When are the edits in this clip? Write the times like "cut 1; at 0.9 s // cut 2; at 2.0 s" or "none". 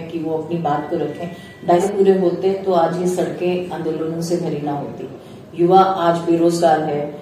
cut 1; at 1.8 s